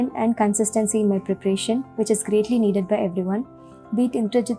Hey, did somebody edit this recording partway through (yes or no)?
no